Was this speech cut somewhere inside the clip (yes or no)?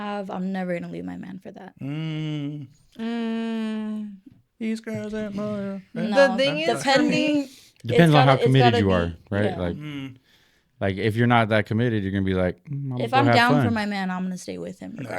no